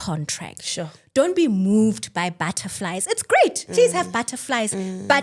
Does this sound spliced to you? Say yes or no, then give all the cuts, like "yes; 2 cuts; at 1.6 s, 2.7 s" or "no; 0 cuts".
no; 0 cuts